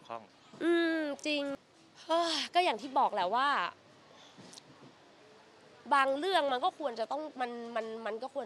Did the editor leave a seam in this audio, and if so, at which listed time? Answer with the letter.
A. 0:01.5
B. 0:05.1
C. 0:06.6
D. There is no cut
A